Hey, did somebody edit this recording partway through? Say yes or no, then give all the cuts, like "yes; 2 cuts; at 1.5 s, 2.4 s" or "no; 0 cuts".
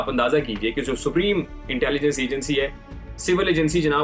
no; 0 cuts